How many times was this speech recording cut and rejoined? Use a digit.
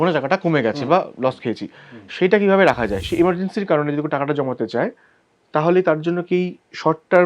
1